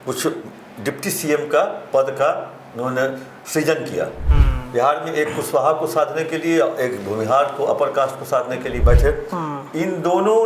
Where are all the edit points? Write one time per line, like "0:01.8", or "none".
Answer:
0:04.2
0:08.7